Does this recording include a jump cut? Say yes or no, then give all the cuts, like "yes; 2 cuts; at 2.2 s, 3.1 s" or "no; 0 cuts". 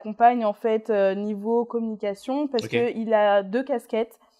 no; 0 cuts